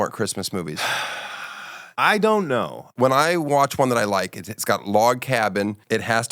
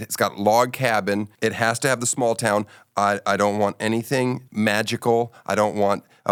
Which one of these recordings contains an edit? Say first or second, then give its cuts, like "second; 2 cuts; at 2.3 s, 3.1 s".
first; 1 cut; at 2.8 s